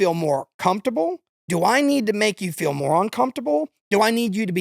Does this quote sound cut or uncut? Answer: cut